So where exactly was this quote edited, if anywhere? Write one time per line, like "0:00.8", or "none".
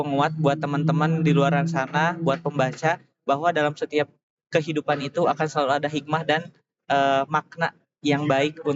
none